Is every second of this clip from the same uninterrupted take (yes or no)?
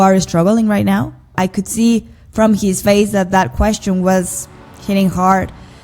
no